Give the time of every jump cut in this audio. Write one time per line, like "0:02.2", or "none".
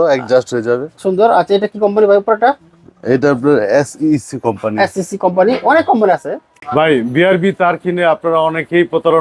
0:06.6